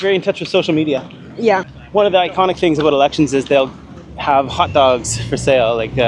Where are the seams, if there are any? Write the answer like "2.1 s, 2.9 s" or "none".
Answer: 1.7 s

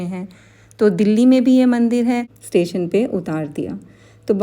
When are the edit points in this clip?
2.3 s

